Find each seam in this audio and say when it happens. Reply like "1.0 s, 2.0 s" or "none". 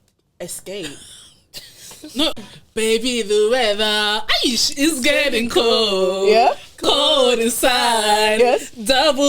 2.5 s